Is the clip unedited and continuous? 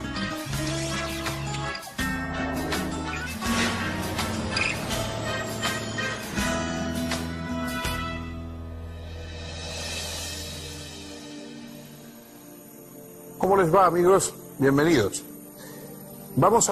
no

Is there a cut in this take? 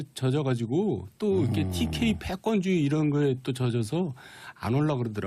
no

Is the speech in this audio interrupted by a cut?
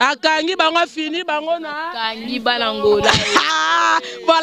no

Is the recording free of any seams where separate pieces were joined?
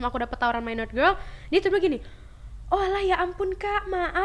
yes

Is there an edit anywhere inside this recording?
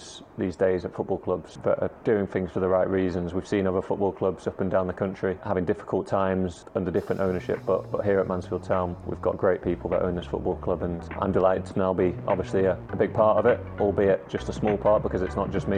yes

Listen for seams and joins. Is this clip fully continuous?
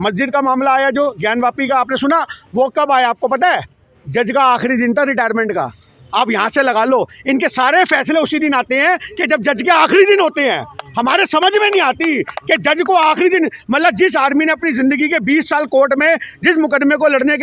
yes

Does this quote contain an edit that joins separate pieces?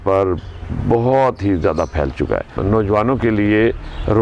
yes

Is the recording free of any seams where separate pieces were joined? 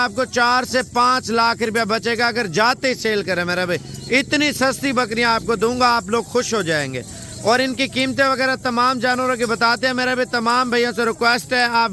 yes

